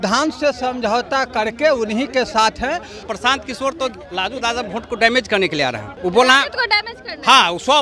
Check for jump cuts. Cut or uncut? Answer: cut